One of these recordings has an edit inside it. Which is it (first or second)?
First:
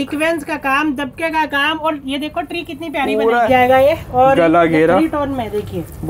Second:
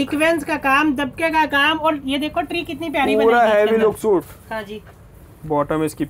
first